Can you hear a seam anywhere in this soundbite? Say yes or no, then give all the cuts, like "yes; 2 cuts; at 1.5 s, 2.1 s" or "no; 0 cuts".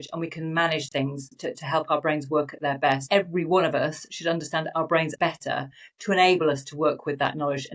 yes; 2 cuts; at 3.0 s, 5.1 s